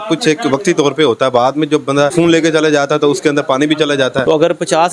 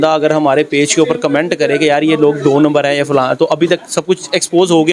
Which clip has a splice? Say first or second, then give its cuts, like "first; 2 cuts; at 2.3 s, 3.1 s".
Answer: first; 2 cuts; at 2.1 s, 4.2 s